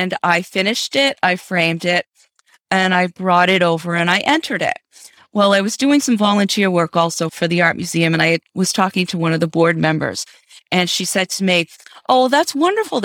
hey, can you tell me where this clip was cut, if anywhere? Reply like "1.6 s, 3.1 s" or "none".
7.3 s